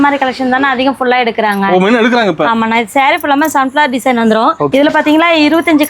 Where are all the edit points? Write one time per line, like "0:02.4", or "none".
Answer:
0:04.7